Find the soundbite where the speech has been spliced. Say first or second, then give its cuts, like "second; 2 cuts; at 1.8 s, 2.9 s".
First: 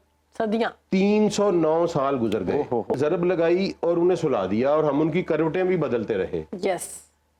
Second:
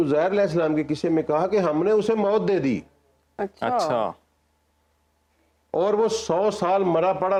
first; 1 cut; at 2.9 s